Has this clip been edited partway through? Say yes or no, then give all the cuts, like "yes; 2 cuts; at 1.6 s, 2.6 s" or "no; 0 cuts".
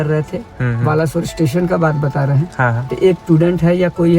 yes; 1 cut; at 3.2 s